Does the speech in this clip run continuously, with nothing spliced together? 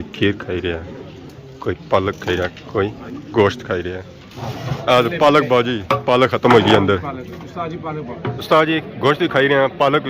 no; 2 cuts; at 4.2 s, 8.4 s

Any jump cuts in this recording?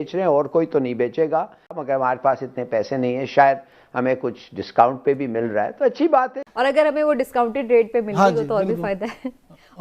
yes; 2 cuts; at 1.8 s, 6.4 s

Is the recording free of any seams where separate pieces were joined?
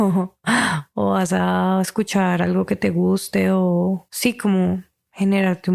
no; 1 cut; at 4.1 s

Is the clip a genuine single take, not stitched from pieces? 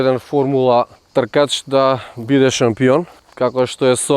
no; 2 cuts; at 1.0 s, 3.2 s

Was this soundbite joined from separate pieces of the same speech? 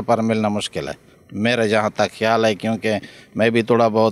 no; 0 cuts

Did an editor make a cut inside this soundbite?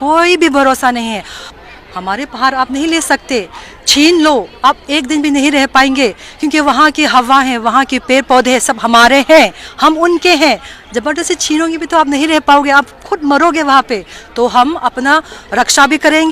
yes; 1 cut; at 1.5 s

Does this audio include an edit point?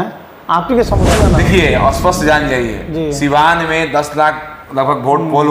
yes; 1 cut; at 1.0 s

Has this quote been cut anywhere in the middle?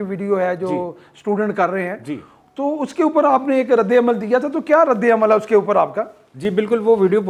no; 0 cuts

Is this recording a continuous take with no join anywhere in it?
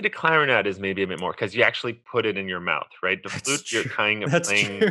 yes; 0 cuts

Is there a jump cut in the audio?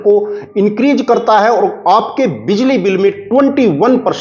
no; 0 cuts

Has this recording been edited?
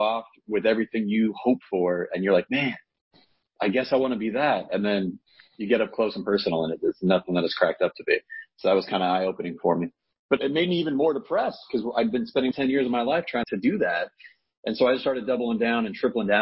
yes; 3 cuts; at 10.4 s, 12.5 s, 13.4 s

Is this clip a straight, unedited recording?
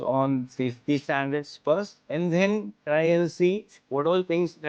yes; 0 cuts

